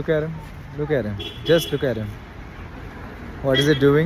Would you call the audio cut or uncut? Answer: uncut